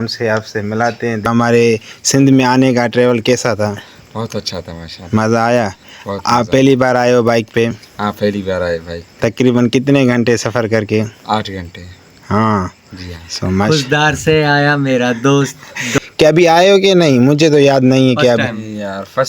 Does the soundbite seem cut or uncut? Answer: cut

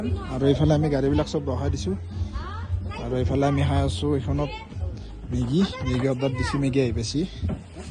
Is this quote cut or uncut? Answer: uncut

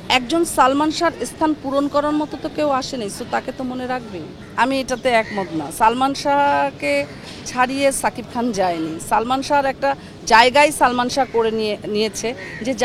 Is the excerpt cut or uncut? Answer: uncut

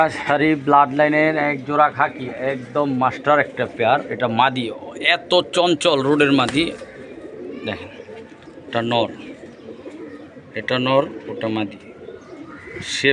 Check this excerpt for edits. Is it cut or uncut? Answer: uncut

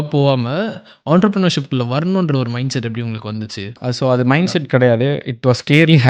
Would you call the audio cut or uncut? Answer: cut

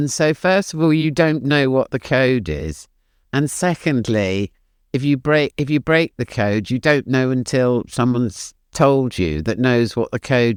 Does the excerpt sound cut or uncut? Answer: uncut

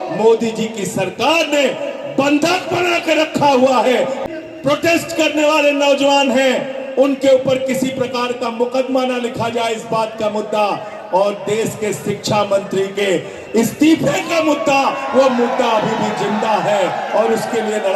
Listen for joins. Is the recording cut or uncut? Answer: cut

